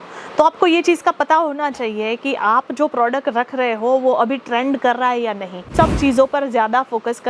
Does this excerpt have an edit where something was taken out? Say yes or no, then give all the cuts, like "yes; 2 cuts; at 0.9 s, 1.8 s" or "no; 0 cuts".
yes; 1 cut; at 5.6 s